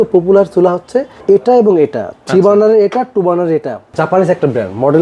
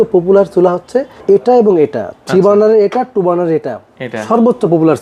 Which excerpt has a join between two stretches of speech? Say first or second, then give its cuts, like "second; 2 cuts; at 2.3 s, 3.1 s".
first; 1 cut; at 3.9 s